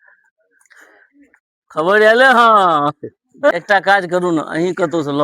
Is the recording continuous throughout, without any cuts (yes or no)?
no